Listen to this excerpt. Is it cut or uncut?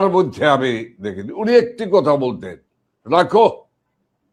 uncut